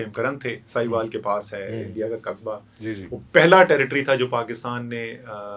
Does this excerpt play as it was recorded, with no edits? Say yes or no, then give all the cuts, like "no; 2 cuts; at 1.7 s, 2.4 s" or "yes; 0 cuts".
yes; 0 cuts